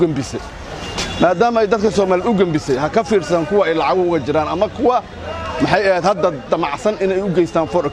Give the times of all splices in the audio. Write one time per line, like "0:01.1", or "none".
none